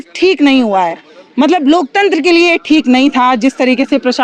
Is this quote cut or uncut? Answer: uncut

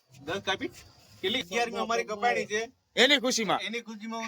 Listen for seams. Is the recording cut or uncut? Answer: cut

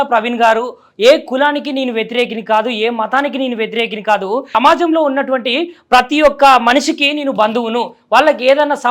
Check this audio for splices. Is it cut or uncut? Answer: cut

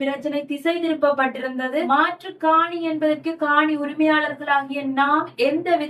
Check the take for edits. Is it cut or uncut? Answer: cut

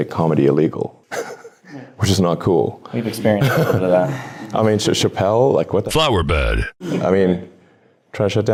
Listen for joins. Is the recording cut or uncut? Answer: uncut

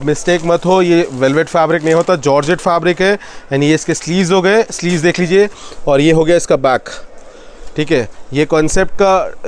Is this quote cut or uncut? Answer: uncut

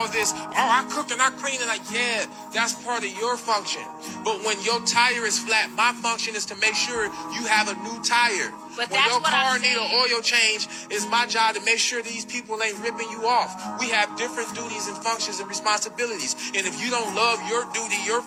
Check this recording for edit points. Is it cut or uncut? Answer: uncut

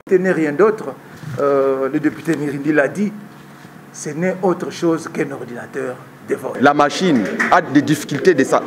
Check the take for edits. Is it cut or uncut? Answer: cut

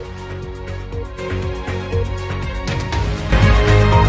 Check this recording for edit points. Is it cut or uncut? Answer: cut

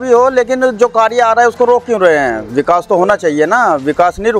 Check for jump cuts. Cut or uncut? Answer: uncut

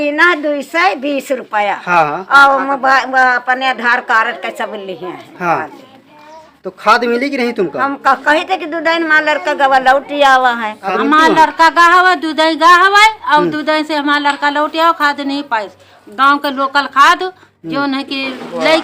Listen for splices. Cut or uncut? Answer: cut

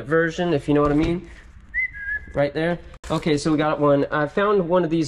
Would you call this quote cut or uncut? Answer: uncut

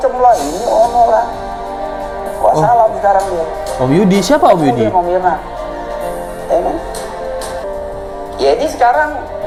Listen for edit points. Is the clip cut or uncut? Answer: uncut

